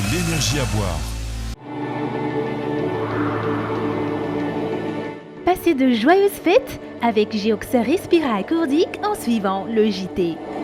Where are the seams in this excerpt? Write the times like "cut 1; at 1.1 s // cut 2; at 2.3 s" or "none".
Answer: cut 1; at 1.6 s